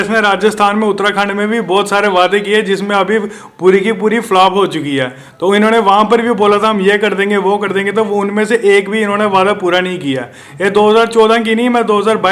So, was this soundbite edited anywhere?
no; 0 cuts

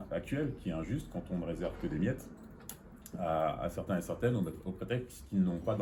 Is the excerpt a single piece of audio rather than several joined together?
yes; 0 cuts

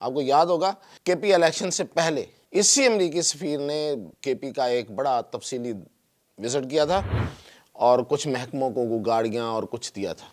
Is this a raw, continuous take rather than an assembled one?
no; 3 cuts; at 0.9 s, 2.4 s, 4.1 s

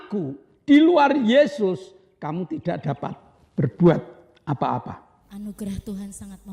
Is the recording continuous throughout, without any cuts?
no; 1 cut; at 5.2 s

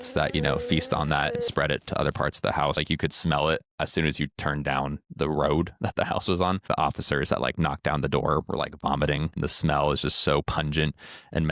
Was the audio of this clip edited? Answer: yes; 4 cuts; at 2.8 s, 3.7 s, 6.6 s, 9.4 s

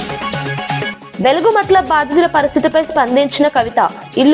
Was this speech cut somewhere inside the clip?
no; 0 cuts

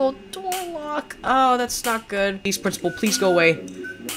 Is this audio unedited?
no; 1 cut; at 2.5 s

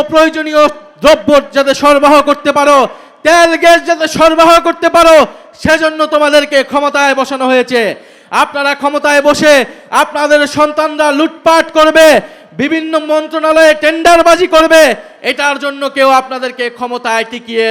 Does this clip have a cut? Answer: no; 0 cuts

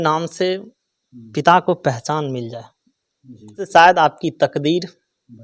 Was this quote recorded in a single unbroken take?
no; 1 cut; at 3.7 s

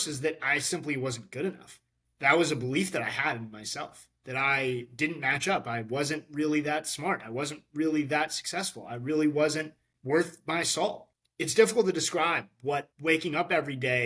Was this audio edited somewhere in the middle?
yes; 2 cuts; at 11.2 s, 12.9 s

